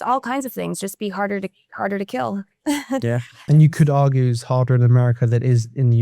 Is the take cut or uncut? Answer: cut